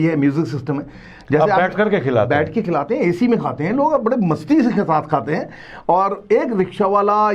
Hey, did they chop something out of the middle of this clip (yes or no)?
no